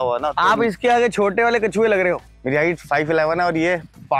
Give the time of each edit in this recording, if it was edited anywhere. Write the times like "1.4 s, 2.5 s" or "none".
none